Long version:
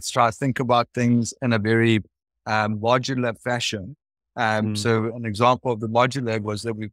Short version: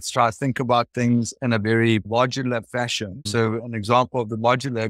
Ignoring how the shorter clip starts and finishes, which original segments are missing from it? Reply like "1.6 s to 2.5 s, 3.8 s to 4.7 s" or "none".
2.1 s to 2.8 s, 4.0 s to 4.8 s